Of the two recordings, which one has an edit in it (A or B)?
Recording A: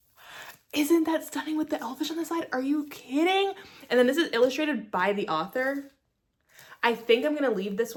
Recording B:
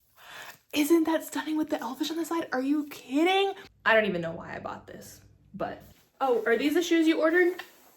B